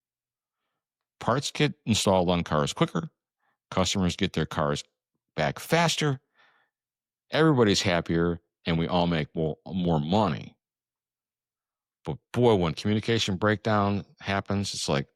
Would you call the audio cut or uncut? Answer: uncut